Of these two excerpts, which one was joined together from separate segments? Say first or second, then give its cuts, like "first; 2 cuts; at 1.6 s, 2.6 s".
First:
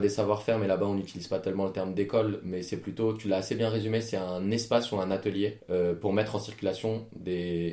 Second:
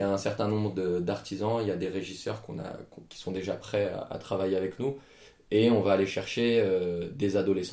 first; 1 cut; at 5.6 s